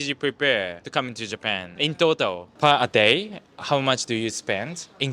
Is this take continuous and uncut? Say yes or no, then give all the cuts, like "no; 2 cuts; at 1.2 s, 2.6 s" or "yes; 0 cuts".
no; 3 cuts; at 0.8 s, 1.7 s, 2.4 s